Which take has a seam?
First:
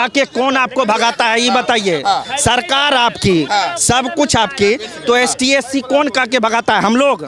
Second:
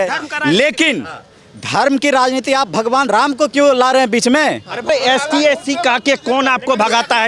second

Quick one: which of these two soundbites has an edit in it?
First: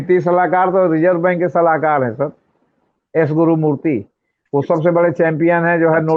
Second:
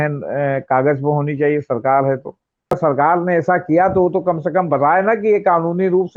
second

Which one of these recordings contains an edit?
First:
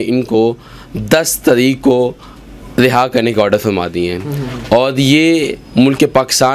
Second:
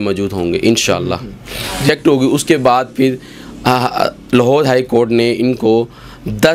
second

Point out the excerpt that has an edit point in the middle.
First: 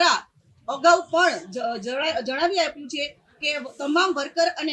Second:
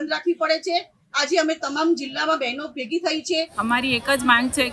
second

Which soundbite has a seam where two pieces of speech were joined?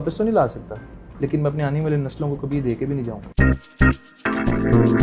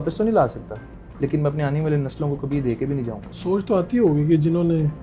second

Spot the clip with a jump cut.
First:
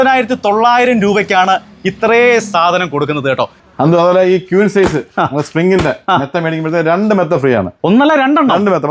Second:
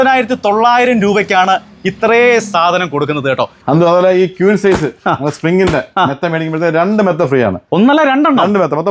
second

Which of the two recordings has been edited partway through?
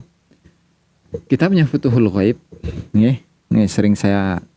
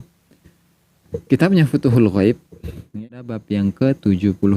second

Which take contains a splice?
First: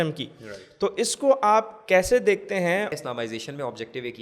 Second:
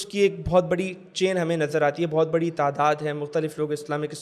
first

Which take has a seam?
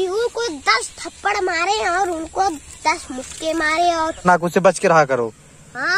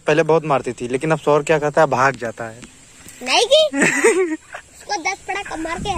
first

